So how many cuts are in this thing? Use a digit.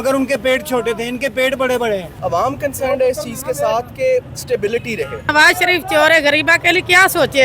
2